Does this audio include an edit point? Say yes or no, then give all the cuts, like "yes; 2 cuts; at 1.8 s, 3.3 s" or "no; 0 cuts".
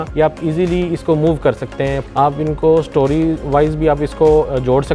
yes; 2 cuts; at 2.0 s, 3.4 s